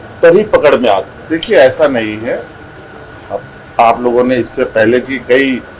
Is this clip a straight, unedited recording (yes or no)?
no